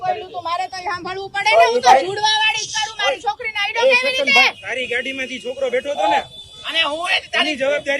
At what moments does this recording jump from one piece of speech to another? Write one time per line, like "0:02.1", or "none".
0:04.6